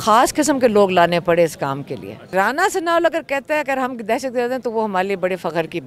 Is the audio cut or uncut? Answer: cut